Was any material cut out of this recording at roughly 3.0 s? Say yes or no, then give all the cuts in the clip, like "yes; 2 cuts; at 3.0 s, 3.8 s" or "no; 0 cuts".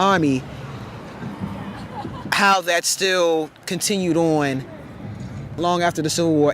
no; 1 cut; at 5.6 s